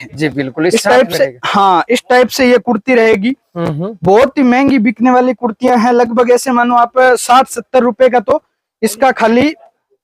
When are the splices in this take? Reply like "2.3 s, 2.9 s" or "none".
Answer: none